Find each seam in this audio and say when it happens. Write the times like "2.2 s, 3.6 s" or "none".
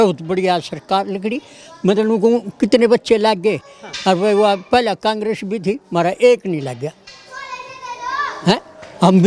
none